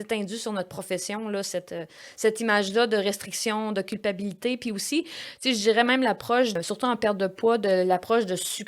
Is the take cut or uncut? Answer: cut